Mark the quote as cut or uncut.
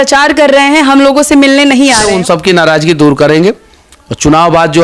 cut